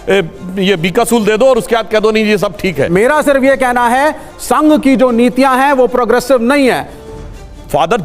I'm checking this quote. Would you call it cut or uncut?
cut